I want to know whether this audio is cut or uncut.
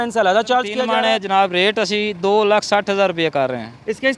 cut